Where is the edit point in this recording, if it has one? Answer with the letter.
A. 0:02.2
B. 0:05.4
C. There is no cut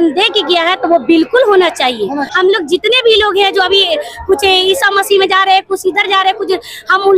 A